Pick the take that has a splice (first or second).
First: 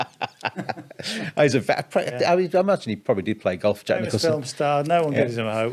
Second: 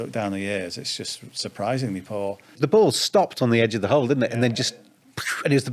second